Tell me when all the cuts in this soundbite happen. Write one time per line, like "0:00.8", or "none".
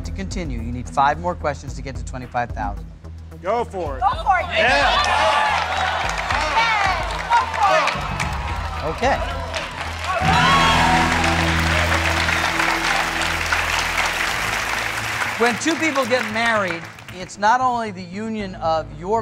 0:03.5